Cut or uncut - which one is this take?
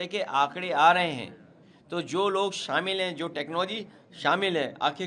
uncut